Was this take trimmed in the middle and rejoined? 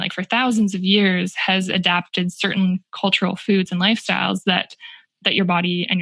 no; 0 cuts

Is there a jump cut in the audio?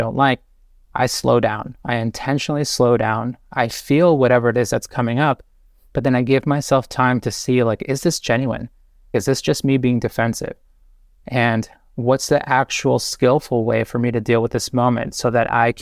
no; 0 cuts

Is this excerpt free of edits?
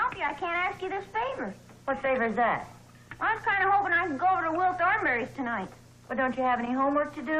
yes; 0 cuts

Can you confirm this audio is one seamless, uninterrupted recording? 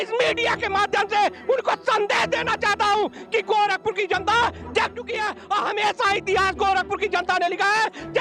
yes; 0 cuts

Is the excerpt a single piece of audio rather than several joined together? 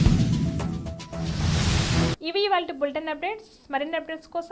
yes; 0 cuts

